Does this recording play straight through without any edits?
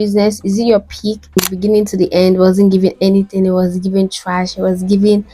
no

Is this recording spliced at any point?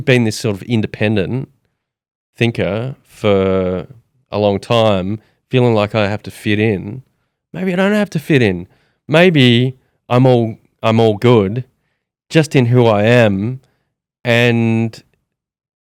no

